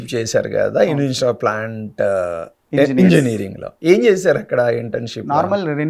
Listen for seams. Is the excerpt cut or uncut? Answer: uncut